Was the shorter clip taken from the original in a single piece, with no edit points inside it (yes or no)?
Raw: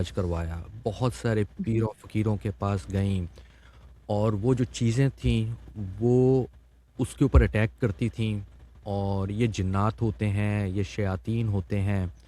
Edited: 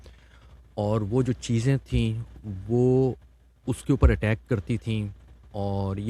yes